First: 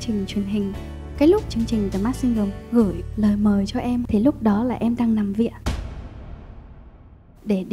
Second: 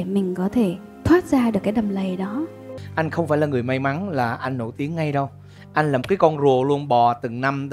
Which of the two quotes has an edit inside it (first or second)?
second